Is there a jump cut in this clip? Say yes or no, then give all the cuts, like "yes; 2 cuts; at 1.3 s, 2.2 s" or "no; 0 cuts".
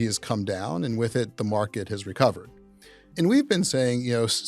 yes; 1 cut; at 3.1 s